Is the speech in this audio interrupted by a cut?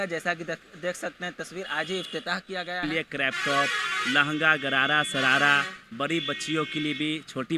yes; 1 cut; at 2.8 s

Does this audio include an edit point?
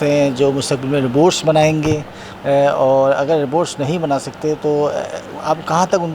no; 0 cuts

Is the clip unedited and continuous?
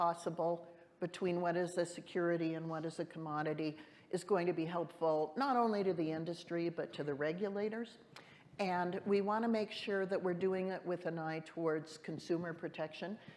yes; 0 cuts

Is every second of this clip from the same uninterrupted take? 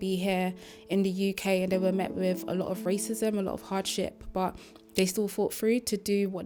yes; 0 cuts

